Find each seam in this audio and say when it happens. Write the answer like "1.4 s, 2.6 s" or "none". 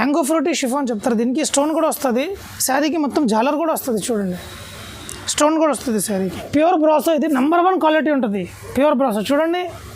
6.4 s